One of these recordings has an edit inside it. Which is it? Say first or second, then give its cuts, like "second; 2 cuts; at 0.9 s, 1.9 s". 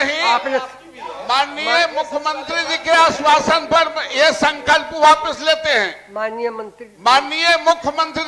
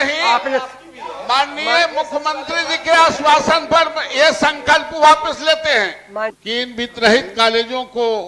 second; 1 cut; at 6.3 s